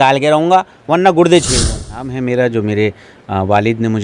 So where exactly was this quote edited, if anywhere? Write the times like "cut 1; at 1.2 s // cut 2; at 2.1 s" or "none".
cut 1; at 2.1 s

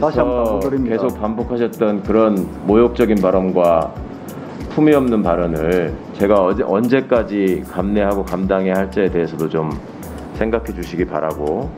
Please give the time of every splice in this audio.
none

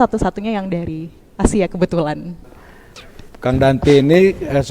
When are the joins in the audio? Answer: cut 1; at 2.5 s

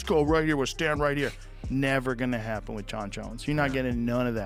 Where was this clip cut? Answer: none

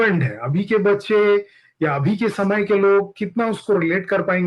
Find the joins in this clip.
none

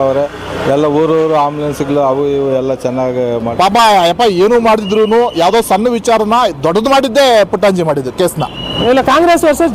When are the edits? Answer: cut 1; at 3.5 s // cut 2; at 8.6 s

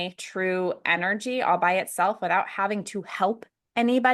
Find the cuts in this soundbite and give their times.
none

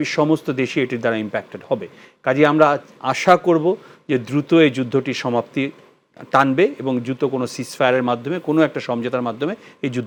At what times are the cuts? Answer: none

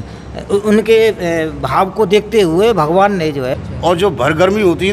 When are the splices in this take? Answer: cut 1; at 3.5 s

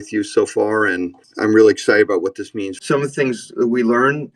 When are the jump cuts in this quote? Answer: cut 1; at 1.2 s // cut 2; at 2.7 s

